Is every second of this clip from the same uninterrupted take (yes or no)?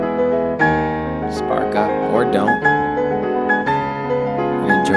yes